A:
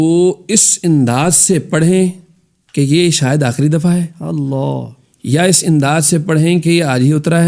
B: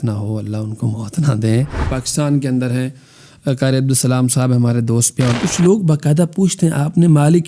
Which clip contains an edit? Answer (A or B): B